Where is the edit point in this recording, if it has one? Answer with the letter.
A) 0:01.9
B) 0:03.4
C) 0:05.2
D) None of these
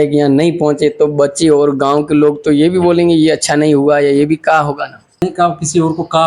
C